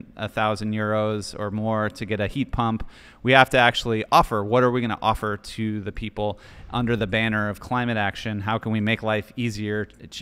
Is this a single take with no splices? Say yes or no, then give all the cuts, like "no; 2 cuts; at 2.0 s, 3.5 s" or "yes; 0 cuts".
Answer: yes; 0 cuts